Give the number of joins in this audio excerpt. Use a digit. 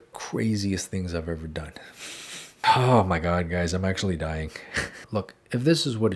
2